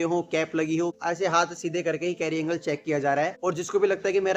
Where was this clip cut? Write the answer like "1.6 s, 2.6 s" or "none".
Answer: 1.0 s, 3.4 s